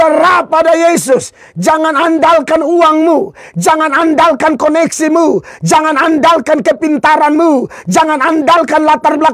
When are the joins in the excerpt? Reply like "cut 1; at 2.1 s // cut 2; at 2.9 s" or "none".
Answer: none